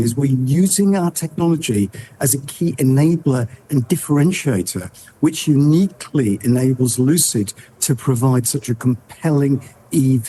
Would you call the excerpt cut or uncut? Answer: uncut